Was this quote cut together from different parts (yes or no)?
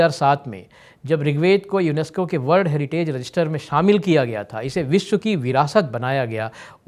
no